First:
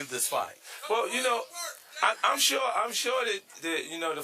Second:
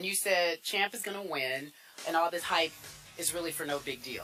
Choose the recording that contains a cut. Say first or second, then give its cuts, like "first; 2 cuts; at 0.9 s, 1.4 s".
first; 1 cut; at 1.0 s